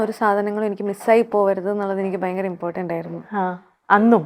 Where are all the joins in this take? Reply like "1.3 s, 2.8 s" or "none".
none